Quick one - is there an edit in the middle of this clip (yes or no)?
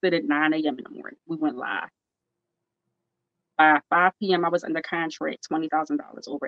no